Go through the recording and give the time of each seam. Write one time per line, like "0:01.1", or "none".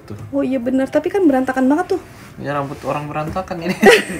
none

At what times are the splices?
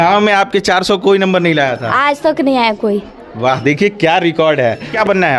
none

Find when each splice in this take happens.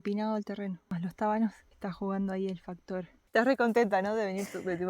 0:00.8
0:01.7
0:03.2

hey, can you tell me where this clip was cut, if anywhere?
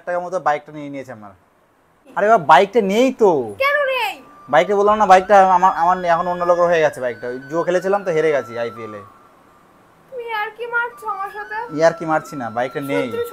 0:02.1

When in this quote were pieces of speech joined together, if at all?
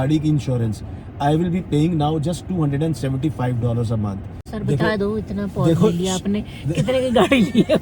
0:04.3

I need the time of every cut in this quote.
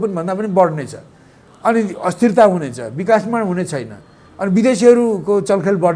none

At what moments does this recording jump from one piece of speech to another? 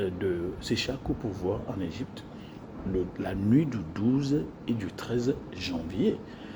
none

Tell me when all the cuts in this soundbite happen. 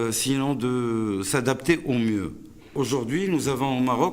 0:02.7

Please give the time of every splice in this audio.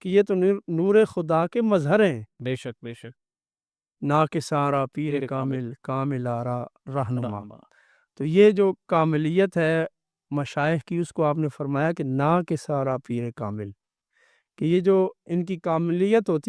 none

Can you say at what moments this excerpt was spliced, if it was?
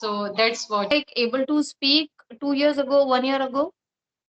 0:00.9

